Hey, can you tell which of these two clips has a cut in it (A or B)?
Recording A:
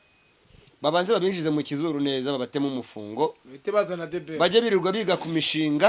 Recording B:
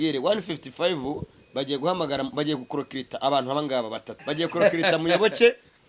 B